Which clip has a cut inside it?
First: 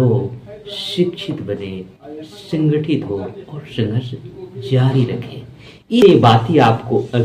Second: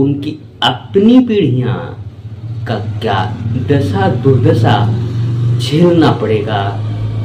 first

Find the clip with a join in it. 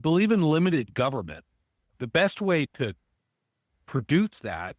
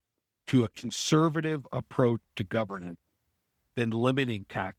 first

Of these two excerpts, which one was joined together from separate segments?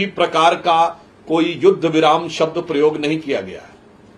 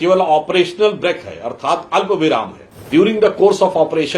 second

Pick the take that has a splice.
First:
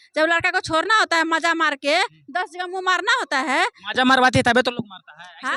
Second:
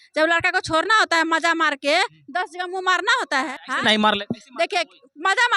second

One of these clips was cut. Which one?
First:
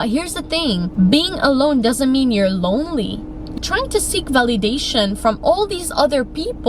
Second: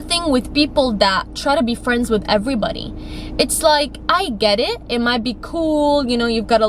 first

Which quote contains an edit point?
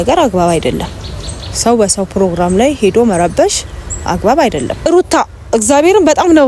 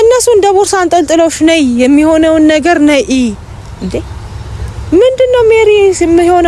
first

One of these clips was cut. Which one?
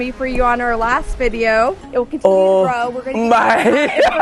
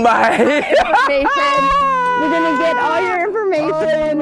first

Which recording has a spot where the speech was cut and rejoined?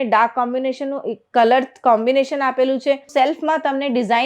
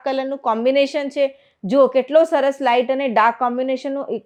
first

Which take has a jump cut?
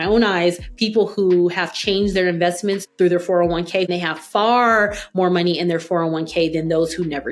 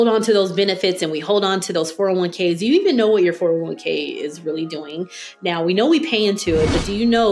first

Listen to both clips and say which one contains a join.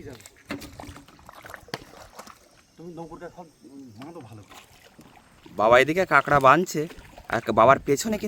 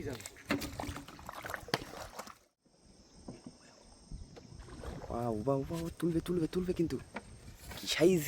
second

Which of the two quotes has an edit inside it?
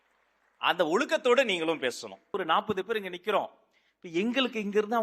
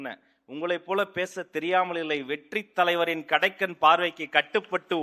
first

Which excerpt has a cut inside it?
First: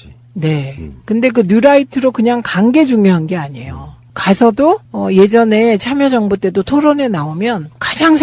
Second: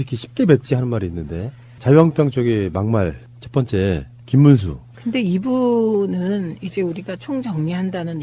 first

